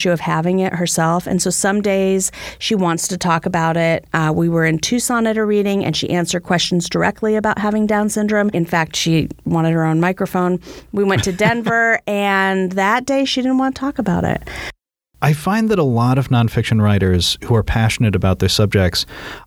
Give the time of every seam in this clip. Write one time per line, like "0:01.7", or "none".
0:08.5
0:14.8